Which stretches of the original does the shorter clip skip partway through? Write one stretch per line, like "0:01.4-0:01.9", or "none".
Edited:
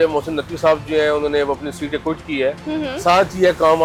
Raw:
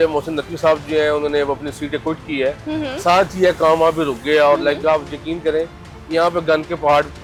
none

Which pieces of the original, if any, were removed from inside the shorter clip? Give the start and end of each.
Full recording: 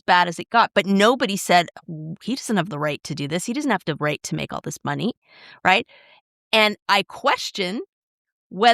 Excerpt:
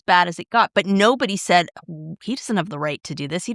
none

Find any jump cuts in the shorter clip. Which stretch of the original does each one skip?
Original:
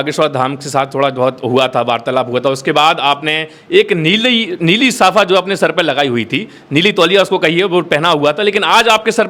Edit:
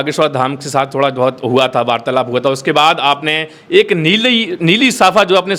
none

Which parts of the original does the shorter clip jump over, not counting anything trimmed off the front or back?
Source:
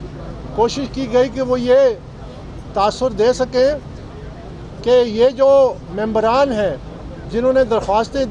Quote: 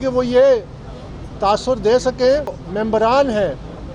0:04.0-0:05.9

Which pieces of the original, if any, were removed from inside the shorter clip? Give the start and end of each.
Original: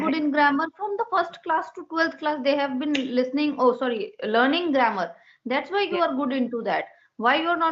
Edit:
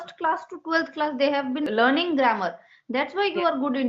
0:02.9-0:04.2

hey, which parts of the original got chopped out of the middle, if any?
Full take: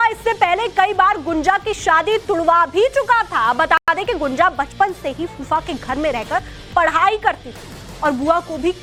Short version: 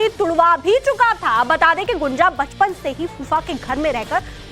0:03.8-0:03.9

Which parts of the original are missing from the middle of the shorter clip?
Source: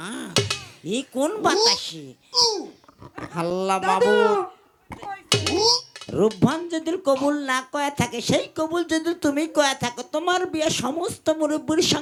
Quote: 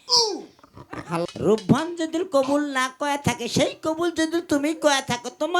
0:03.5-0:06.0

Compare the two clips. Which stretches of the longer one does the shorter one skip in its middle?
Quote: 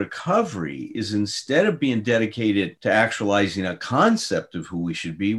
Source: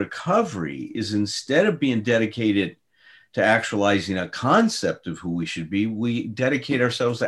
0:02.7-0:03.3

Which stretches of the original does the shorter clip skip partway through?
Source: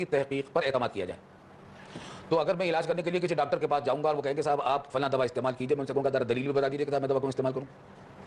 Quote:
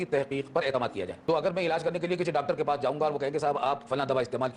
0:01.2-0:02.2

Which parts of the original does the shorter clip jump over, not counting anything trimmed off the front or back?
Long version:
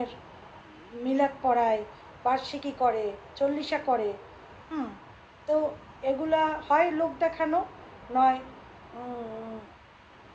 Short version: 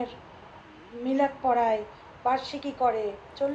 none

